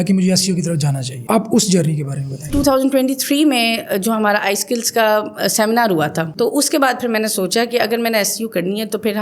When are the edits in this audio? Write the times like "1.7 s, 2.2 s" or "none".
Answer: 1.1 s, 2.5 s, 6.3 s